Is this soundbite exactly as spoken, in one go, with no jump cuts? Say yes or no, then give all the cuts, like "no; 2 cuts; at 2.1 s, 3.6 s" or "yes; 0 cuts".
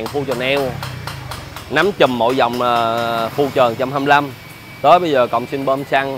yes; 0 cuts